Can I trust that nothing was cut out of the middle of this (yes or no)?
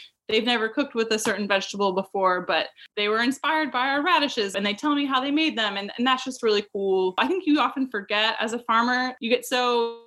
no